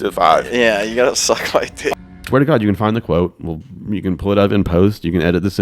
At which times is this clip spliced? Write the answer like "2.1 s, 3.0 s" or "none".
1.9 s